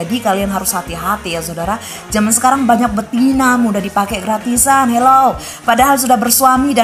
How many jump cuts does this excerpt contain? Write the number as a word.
zero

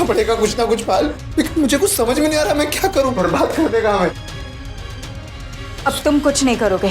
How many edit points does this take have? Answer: one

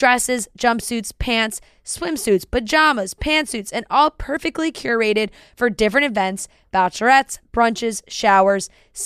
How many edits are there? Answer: zero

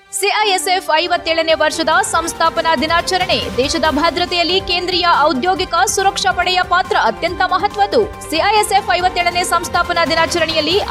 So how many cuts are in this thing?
zero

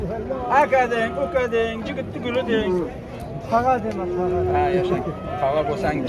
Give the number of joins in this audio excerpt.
zero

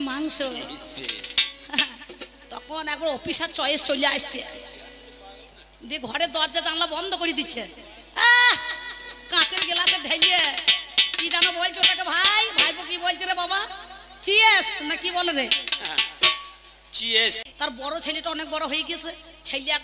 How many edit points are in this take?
one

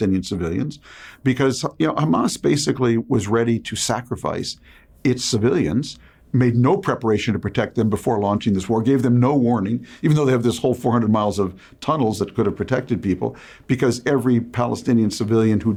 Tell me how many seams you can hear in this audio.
zero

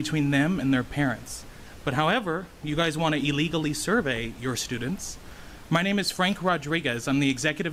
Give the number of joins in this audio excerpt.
zero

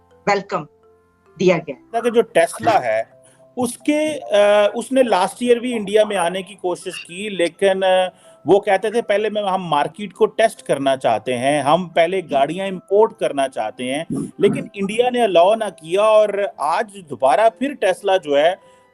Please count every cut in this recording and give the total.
one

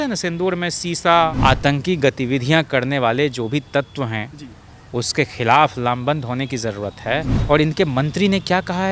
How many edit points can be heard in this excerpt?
two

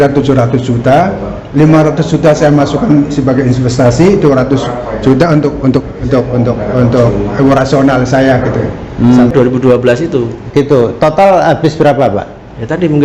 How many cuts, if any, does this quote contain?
one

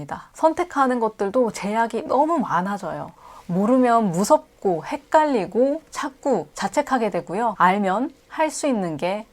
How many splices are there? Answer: two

